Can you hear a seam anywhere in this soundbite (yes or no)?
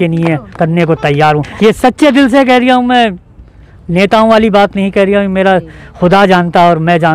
yes